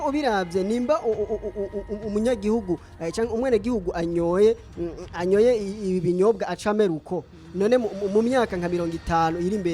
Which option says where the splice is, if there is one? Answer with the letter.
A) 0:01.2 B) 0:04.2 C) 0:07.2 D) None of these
D